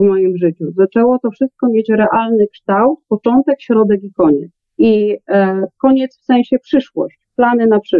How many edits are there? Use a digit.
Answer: 1